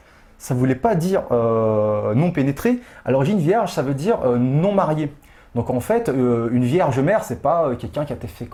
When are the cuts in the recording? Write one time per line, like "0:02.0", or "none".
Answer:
none